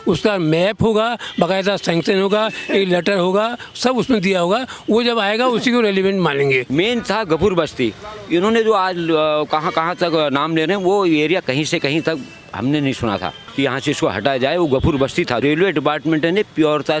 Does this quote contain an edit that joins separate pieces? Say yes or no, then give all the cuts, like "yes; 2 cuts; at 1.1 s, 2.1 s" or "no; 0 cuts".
yes; 3 cuts; at 6.7 s, 13.4 s, 15.4 s